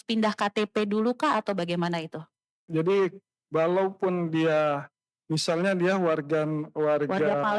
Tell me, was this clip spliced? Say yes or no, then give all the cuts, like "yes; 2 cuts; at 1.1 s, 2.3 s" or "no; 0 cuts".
yes; 1 cut; at 2.6 s